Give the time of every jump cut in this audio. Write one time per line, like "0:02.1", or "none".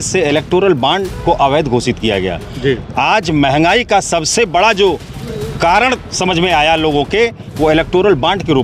none